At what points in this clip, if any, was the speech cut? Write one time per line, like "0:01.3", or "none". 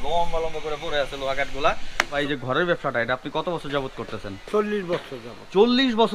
0:02.1